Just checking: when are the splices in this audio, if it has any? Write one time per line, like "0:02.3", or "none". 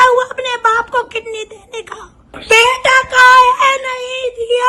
0:02.4